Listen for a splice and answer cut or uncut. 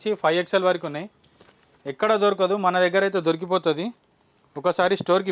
uncut